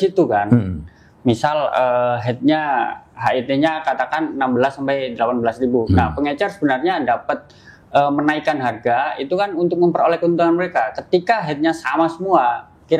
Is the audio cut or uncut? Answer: uncut